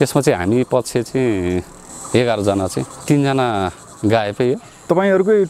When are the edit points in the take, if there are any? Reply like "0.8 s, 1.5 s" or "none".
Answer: 3.0 s